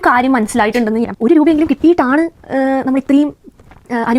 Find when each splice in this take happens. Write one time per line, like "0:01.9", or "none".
0:01.1